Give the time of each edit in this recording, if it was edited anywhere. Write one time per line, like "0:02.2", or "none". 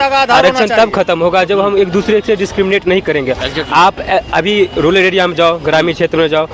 none